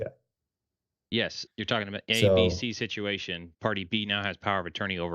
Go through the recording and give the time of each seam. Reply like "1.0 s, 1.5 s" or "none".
1.5 s